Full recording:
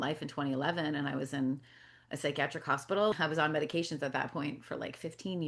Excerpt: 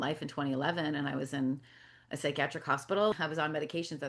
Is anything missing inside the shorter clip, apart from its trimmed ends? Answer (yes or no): no